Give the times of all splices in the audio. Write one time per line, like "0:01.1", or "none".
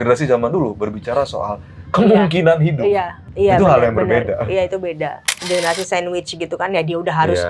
0:03.2
0:05.4